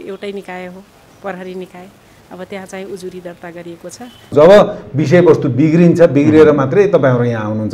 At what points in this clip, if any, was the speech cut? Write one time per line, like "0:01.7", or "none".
0:04.3